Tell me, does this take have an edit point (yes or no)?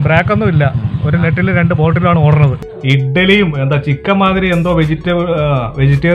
yes